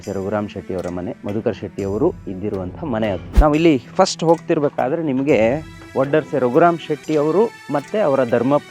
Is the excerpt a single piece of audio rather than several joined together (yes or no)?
no